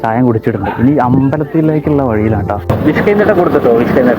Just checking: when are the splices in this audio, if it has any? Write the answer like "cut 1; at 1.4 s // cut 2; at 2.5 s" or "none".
cut 1; at 2.7 s